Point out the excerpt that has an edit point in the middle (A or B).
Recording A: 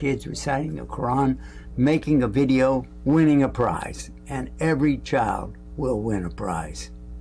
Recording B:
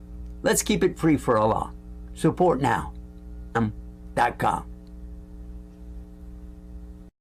B